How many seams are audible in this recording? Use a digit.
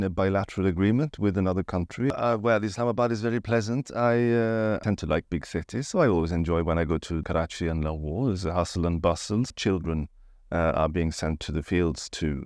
4